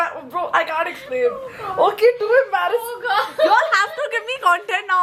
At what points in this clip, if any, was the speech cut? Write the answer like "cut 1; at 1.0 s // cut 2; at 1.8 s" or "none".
none